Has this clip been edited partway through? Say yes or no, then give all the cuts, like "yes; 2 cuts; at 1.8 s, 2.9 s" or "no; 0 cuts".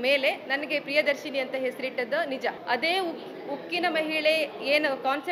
yes; 1 cut; at 2.6 s